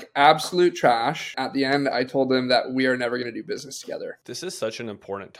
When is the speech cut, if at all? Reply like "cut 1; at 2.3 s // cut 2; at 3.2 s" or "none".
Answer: cut 1; at 1.4 s // cut 2; at 4.2 s